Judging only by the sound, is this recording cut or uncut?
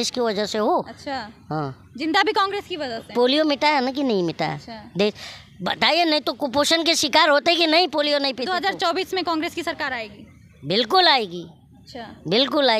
uncut